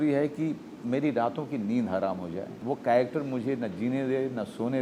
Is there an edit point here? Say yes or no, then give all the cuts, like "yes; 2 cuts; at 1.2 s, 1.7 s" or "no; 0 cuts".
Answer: no; 0 cuts